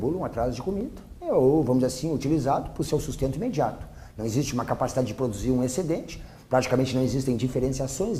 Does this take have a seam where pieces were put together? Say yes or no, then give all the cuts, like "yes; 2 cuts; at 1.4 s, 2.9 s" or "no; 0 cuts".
no; 0 cuts